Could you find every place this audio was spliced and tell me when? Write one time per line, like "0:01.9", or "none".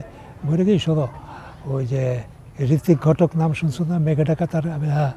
none